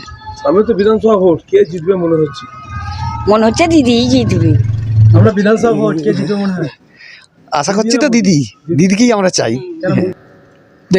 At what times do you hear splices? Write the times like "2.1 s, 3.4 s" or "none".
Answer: 5.2 s, 9.9 s